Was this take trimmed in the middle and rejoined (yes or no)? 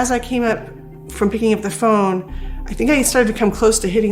no